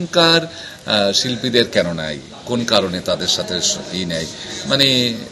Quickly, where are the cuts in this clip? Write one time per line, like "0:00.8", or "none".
none